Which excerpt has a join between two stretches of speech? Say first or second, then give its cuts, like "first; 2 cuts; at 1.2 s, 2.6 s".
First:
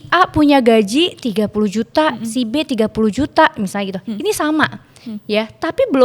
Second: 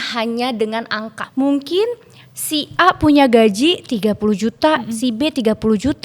second; 1 cut; at 1.2 s